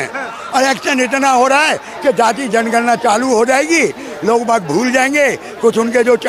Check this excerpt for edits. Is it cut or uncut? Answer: uncut